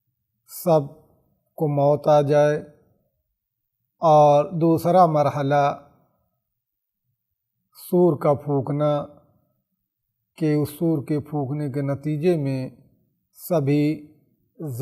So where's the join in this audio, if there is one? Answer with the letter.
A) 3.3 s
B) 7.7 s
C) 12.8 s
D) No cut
D